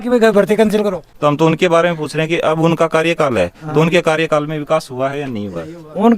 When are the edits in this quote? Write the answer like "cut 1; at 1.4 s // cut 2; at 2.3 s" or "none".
cut 1; at 1.1 s